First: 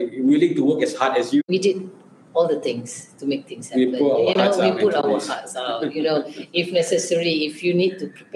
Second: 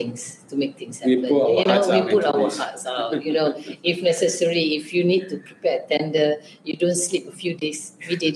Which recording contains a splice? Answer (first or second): first